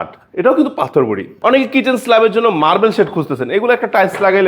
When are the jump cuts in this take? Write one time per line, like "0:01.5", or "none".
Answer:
0:01.3